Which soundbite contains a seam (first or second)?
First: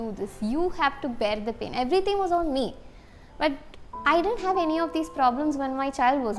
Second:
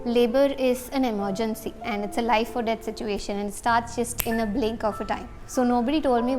second